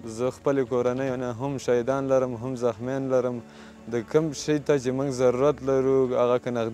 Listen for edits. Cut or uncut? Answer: uncut